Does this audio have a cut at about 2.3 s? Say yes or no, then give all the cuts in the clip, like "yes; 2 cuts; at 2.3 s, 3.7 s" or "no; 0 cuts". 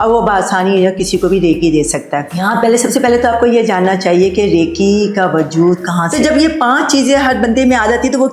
yes; 2 cuts; at 2.3 s, 6.0 s